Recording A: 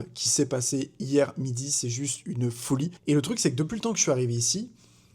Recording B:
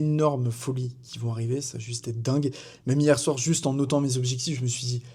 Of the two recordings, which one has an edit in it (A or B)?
A